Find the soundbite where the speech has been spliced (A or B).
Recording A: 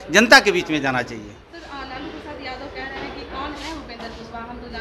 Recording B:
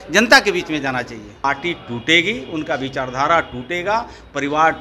B